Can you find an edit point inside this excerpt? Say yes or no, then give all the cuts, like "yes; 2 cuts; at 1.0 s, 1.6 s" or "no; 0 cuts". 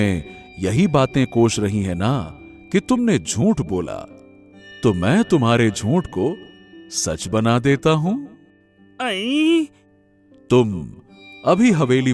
yes; 1 cut; at 9.8 s